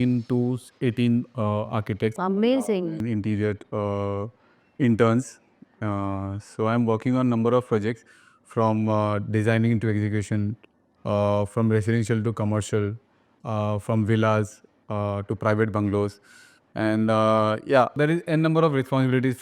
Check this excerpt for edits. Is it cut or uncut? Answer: uncut